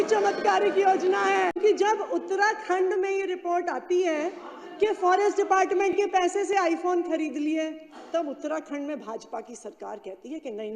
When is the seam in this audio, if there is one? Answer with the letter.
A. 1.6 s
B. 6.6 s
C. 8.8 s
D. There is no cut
A